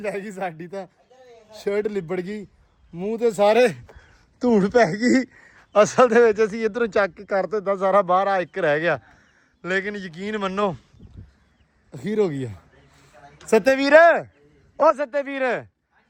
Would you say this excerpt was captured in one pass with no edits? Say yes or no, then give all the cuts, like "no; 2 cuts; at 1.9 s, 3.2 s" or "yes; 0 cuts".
yes; 0 cuts